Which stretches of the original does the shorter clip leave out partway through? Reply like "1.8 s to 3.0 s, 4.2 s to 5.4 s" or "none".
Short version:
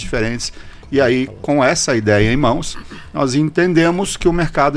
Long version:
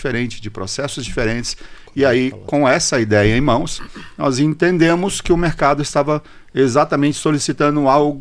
none

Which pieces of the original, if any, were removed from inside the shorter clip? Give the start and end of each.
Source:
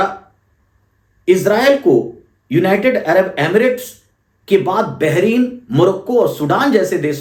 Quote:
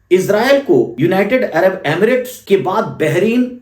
2.1 s to 2.5 s, 3.9 s to 4.4 s

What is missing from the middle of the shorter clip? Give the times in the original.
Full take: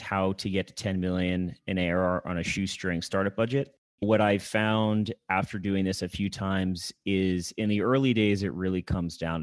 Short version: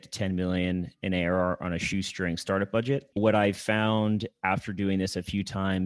3.7 s to 3.9 s

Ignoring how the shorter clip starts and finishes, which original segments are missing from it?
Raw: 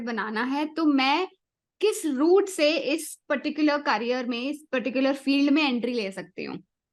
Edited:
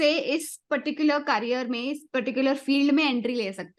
none

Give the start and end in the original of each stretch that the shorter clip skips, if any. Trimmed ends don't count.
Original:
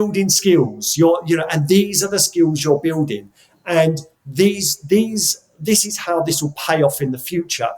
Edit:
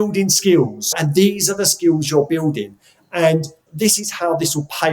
0.9 s to 1.4 s, 4.1 s to 5.5 s

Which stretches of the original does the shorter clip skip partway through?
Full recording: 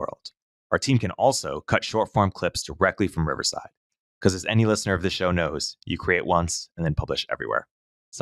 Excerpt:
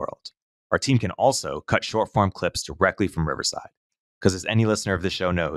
none

